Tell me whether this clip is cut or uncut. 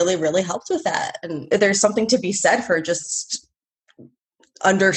uncut